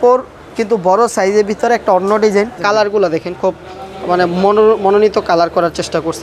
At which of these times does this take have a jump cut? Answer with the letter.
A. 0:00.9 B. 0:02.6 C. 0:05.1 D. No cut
B